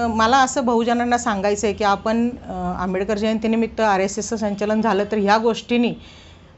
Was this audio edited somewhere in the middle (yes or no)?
no